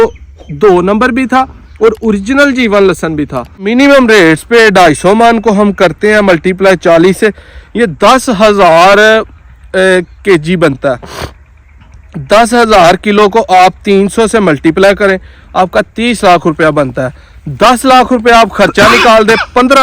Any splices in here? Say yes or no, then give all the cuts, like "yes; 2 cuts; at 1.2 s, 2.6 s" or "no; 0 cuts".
yes; 1 cut; at 3.7 s